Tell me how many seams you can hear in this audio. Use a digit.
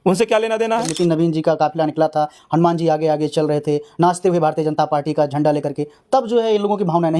1